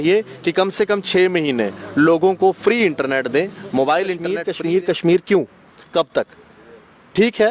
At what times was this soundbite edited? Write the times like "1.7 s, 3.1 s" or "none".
4.4 s